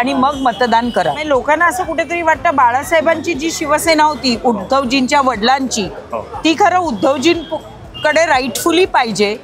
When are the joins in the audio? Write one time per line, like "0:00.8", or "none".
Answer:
0:01.2